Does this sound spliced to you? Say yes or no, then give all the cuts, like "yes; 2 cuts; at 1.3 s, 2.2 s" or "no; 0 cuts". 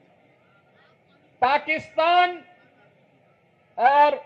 no; 0 cuts